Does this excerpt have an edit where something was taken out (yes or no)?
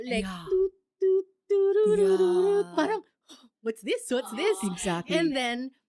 no